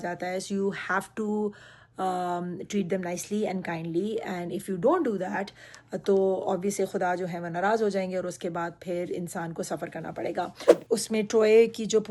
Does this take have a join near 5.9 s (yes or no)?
no